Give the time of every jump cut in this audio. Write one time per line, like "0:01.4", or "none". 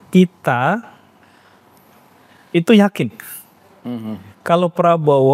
none